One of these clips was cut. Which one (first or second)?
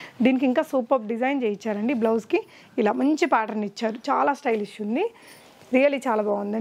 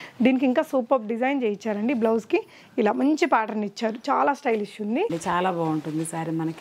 second